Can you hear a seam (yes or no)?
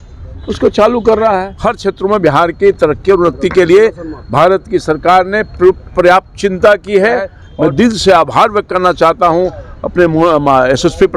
yes